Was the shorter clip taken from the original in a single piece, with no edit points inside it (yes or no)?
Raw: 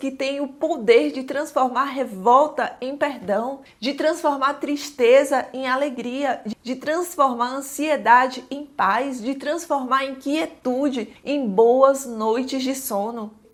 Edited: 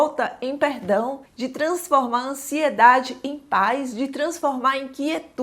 no